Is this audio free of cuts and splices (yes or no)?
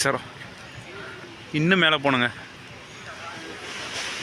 yes